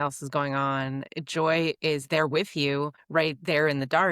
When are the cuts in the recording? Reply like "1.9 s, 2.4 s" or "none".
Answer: 3.0 s